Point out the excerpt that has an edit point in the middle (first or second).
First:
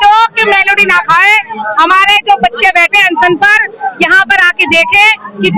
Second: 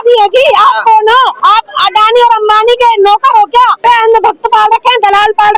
second